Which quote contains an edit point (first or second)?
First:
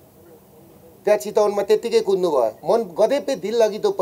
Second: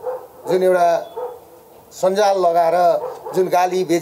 first